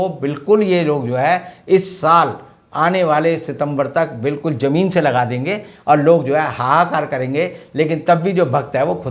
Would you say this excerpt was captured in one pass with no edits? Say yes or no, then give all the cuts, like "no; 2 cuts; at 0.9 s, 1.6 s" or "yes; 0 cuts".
yes; 0 cuts